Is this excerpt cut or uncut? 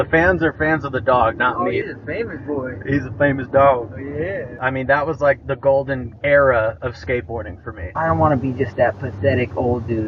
cut